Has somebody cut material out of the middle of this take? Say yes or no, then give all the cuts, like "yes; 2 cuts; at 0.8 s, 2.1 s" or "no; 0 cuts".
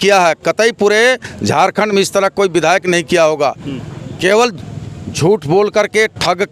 no; 0 cuts